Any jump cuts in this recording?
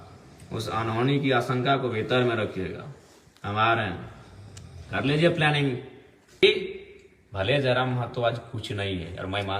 yes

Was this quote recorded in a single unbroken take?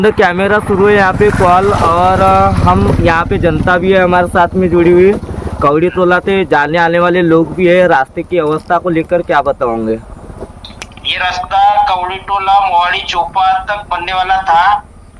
yes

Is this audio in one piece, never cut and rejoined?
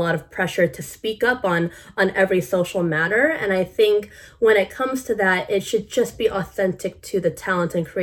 yes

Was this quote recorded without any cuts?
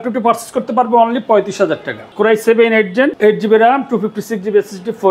no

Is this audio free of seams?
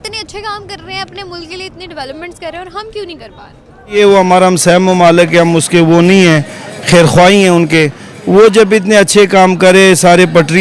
no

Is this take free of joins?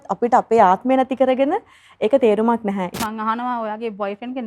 no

